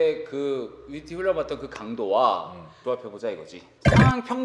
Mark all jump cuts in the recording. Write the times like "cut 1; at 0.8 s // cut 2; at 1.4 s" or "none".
none